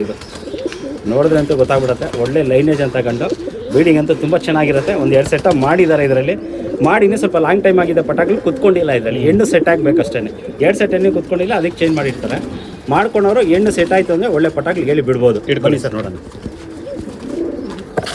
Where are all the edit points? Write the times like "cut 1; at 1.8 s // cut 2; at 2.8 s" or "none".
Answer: none